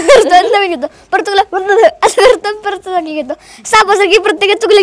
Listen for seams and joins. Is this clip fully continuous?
yes; 0 cuts

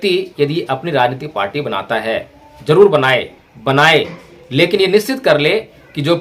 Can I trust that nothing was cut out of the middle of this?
no; 1 cut; at 3.4 s

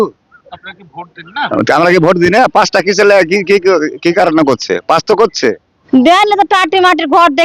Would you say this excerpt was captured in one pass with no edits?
no; 1 cut; at 5.7 s

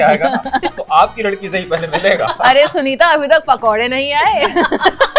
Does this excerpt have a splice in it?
no; 0 cuts

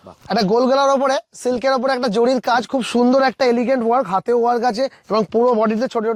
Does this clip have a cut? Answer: no; 0 cuts

